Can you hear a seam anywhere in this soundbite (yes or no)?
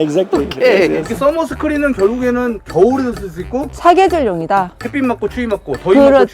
yes